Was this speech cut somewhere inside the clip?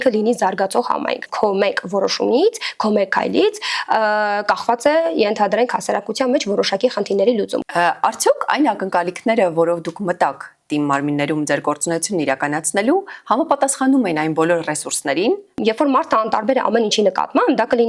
yes; 3 cuts; at 1.3 s, 7.6 s, 15.6 s

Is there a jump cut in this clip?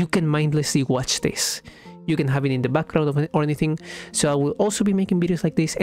no; 0 cuts

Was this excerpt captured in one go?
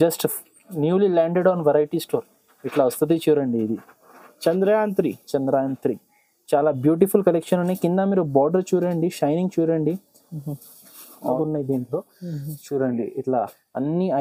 no; 1 cut; at 11.4 s

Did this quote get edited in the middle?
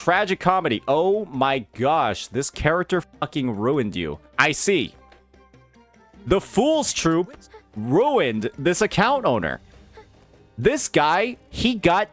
no; 0 cuts

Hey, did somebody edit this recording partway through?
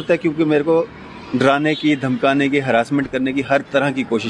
no; 0 cuts

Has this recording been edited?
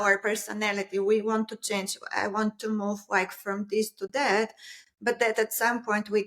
no; 0 cuts

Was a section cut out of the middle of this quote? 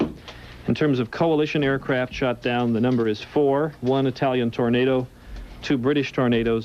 yes; 1 cut; at 3.0 s

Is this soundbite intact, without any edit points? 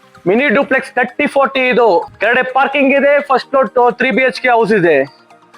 no; 1 cut; at 2.1 s

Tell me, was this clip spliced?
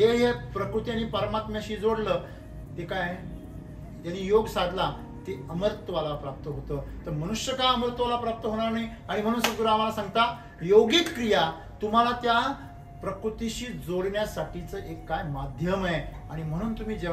no; 0 cuts

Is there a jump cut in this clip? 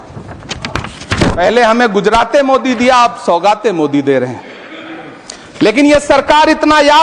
no; 0 cuts

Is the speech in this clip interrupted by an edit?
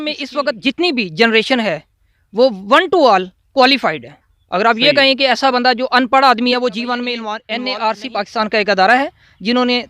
yes; 1 cut; at 7.4 s

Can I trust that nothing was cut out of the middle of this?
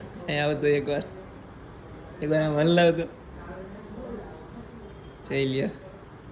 yes; 0 cuts

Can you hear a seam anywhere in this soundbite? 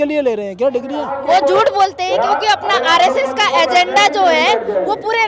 yes; 1 cut; at 1.1 s

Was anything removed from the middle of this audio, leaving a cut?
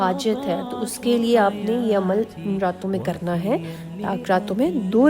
no; 0 cuts

